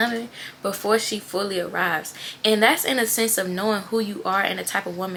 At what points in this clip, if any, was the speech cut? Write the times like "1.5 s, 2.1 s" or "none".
none